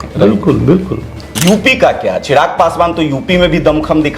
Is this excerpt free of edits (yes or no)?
no